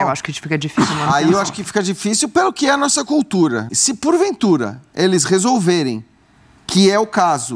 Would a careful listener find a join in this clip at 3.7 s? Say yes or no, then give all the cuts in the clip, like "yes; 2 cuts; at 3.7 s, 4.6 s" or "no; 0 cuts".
yes; 1 cut; at 3.7 s